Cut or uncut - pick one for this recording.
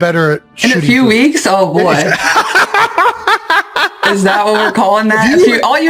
uncut